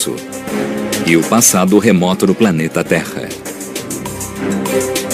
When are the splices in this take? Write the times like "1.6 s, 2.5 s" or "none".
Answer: 2.7 s